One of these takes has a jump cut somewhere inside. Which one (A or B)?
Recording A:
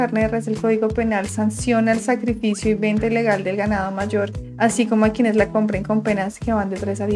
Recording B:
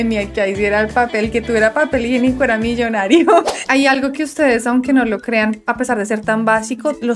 B